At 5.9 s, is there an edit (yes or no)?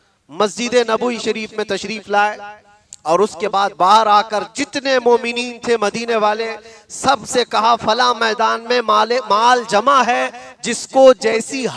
no